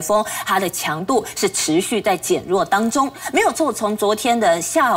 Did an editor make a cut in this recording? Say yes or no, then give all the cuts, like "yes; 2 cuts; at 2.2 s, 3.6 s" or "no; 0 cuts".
no; 0 cuts